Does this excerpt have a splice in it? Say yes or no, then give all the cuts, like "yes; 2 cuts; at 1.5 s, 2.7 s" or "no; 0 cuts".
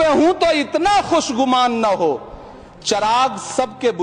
no; 0 cuts